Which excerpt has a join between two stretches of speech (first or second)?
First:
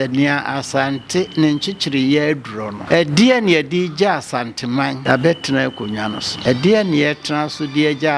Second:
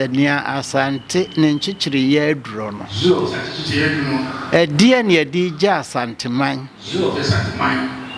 first